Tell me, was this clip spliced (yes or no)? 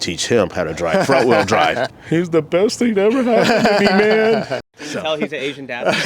yes